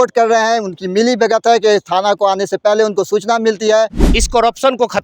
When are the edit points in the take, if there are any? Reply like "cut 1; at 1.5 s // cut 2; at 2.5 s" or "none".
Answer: cut 1; at 4.0 s